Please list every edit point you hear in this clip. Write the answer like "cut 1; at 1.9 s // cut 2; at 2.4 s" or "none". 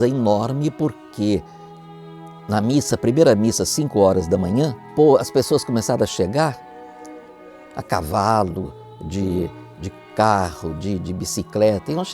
cut 1; at 4.9 s

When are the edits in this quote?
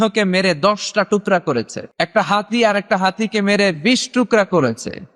cut 1; at 1.8 s

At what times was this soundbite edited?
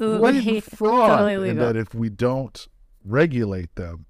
cut 1; at 1.5 s

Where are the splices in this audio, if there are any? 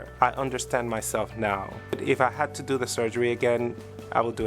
cut 1; at 1.8 s

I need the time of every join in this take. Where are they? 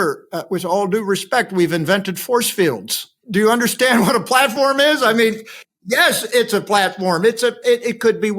cut 1; at 3.2 s

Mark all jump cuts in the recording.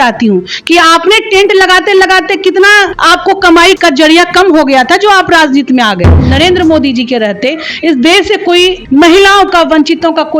cut 1; at 3.0 s // cut 2; at 3.8 s // cut 3; at 6.2 s // cut 4; at 8.8 s

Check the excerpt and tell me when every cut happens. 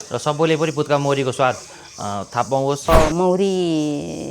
cut 1; at 2.9 s

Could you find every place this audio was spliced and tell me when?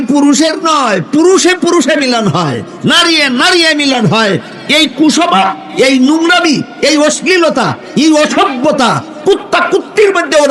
none

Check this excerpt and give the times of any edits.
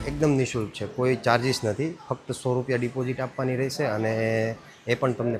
none

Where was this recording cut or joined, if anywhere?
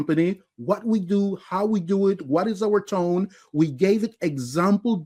none

